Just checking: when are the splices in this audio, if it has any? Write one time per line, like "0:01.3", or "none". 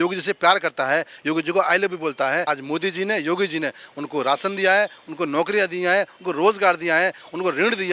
0:02.5